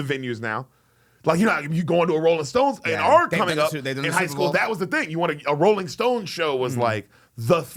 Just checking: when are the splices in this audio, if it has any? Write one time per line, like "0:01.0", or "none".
none